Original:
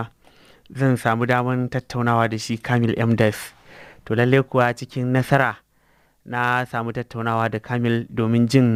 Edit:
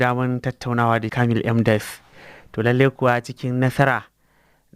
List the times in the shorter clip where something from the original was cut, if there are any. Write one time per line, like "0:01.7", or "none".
0:01.1